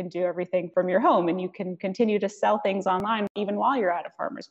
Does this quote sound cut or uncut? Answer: cut